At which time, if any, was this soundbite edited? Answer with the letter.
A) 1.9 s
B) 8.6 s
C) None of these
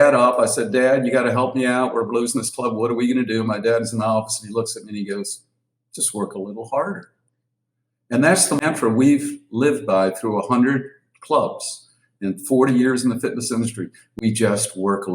B